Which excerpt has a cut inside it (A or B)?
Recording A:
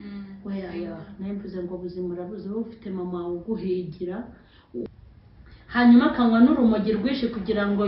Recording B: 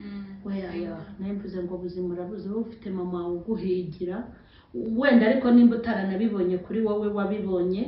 A